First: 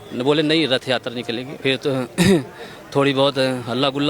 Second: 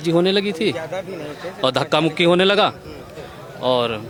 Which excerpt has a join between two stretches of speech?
first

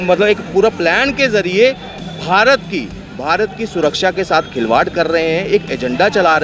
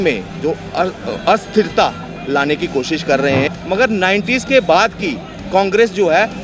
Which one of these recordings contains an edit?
second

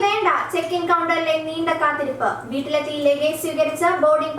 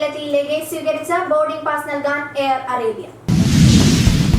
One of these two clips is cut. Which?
second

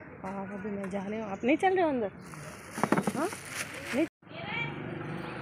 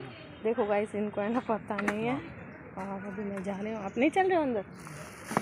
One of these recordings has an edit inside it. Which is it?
first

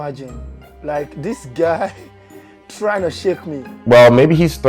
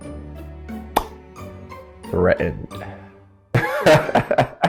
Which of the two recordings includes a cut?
first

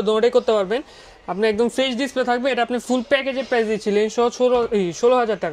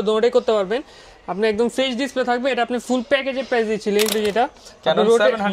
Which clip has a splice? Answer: second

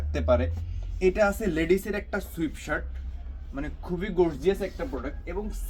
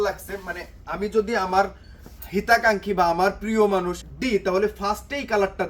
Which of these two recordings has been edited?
second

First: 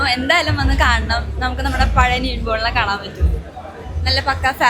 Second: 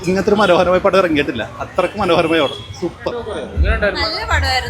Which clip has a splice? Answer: second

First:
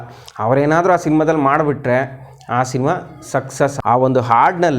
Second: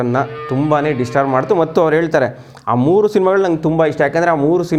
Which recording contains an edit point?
first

